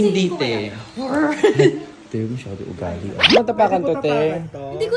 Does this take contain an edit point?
yes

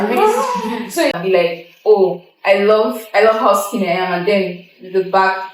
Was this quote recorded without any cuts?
no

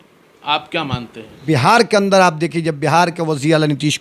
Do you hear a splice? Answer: yes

